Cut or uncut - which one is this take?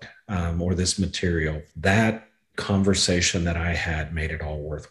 cut